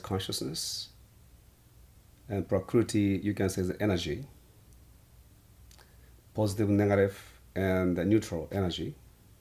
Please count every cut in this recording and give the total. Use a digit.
1